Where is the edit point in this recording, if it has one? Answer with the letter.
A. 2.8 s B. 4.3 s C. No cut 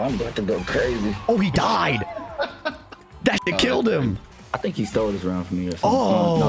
B